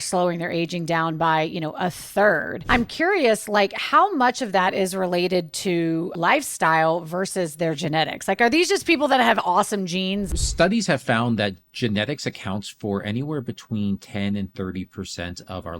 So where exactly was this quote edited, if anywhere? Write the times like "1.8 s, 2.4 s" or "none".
2.5 s, 6.1 s, 10.3 s